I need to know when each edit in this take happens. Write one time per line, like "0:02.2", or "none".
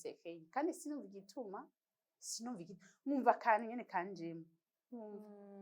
none